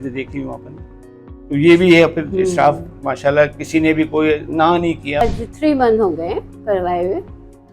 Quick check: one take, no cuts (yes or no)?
no